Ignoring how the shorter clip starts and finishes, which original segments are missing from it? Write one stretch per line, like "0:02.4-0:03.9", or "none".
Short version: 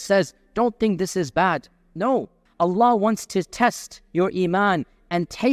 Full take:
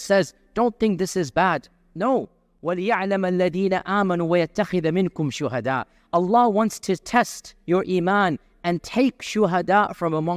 0:02.4-0:05.9